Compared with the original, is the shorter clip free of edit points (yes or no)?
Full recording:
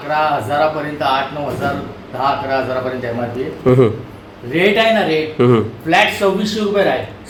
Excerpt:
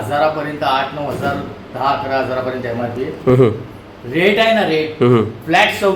yes